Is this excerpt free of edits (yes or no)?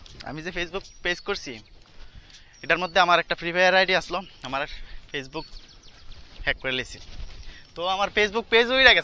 yes